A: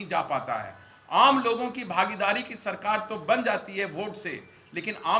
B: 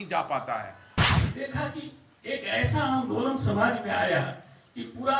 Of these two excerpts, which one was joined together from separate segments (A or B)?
B